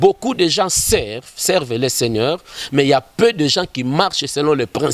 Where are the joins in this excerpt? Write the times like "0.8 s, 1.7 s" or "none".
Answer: none